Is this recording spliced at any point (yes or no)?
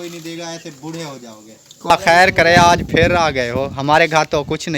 yes